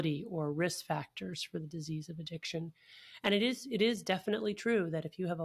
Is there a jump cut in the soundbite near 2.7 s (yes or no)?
no